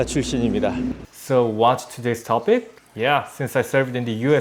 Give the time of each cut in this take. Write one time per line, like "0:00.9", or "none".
0:01.1
0:02.8